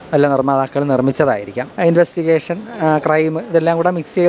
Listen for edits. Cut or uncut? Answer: cut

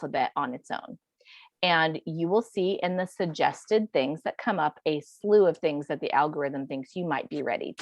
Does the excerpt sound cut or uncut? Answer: uncut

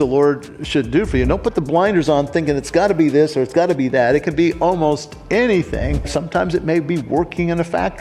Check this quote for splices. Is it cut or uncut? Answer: cut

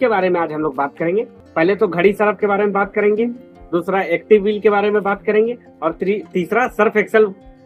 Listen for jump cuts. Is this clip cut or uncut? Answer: cut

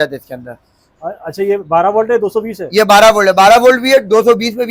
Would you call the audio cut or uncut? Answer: uncut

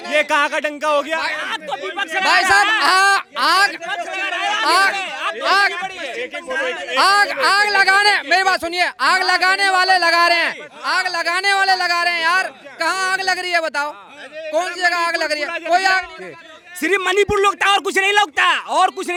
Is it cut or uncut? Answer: uncut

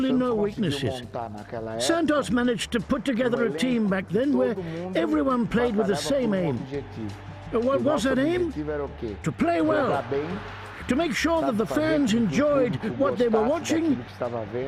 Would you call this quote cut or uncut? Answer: uncut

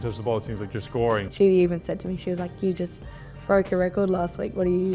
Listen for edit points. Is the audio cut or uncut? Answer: cut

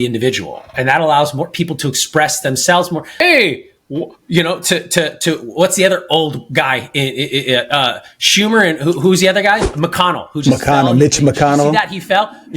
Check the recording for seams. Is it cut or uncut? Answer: cut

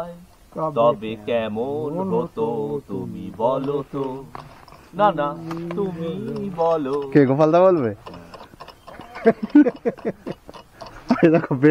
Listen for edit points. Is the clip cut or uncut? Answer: uncut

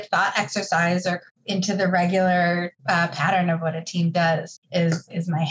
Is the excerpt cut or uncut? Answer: cut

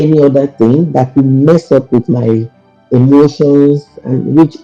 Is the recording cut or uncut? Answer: uncut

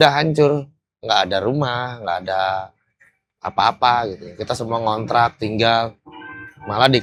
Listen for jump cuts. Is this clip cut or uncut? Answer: uncut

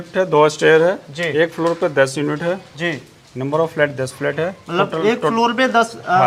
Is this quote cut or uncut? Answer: uncut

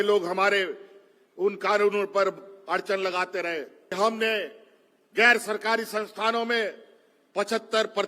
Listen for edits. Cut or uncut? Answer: cut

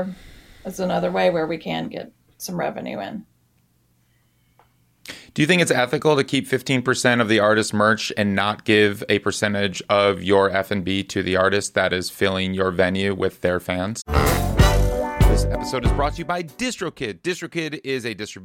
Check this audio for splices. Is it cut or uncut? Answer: cut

